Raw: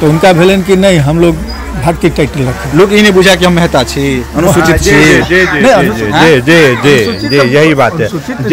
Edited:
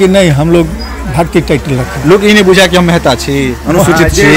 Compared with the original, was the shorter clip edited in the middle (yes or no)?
no